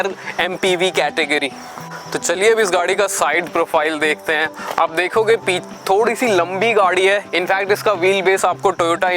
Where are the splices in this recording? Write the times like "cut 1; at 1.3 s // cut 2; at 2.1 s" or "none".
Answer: none